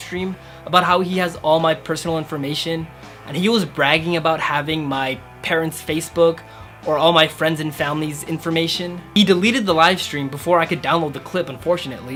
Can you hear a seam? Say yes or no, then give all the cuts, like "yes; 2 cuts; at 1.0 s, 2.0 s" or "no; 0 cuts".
no; 0 cuts